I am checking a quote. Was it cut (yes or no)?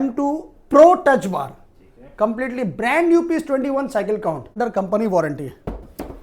yes